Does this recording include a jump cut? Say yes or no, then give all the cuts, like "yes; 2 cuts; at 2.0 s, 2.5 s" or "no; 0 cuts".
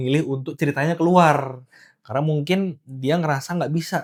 no; 0 cuts